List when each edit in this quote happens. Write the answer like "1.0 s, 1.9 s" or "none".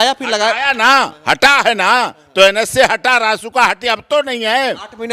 none